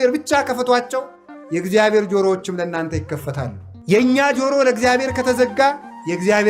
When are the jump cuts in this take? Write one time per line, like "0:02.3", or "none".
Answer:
0:03.7